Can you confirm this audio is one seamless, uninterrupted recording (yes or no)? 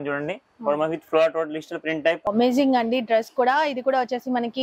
no